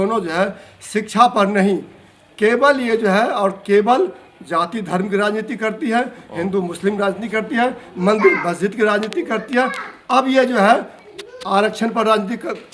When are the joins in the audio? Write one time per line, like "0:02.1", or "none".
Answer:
none